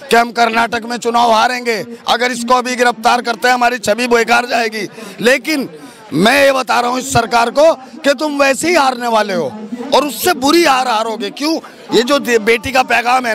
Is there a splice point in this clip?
no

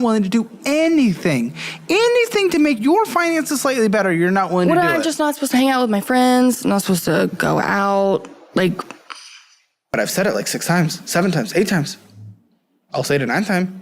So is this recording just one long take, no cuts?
no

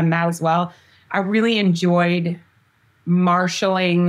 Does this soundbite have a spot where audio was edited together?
no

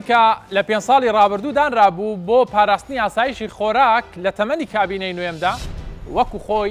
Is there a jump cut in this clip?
no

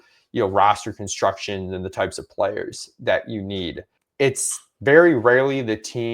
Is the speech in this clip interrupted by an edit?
yes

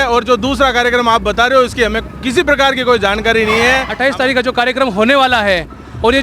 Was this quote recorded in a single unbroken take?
no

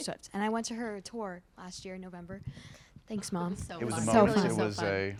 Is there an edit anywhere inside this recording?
no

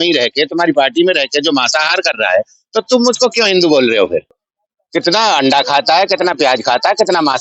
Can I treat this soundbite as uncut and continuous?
no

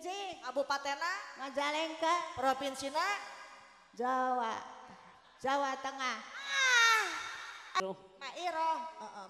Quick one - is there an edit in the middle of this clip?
yes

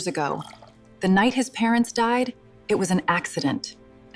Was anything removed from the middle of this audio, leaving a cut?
no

